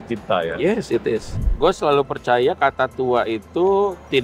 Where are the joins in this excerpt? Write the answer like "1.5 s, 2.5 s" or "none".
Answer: 1.3 s